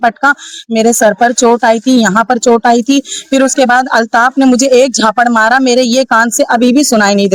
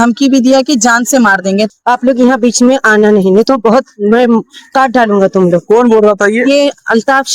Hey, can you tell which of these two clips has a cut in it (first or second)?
second